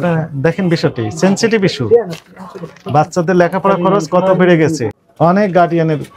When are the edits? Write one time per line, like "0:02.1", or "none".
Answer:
0:05.0